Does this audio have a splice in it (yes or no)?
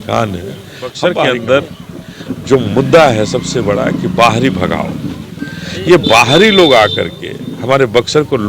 yes